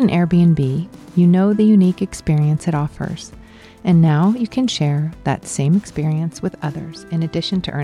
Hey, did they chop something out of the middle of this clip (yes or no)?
no